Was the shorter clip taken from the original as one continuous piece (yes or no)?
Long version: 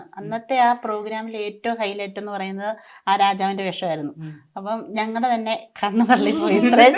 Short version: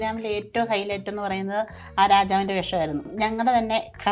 no